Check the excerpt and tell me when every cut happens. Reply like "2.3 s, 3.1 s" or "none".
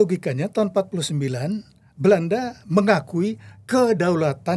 none